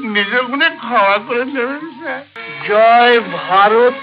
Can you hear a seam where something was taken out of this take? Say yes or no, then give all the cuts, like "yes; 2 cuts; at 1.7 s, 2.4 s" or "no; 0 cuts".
yes; 1 cut; at 2.3 s